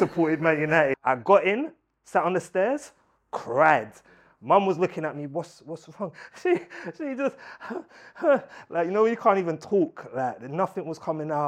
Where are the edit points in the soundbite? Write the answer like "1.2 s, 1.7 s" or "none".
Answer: 1.0 s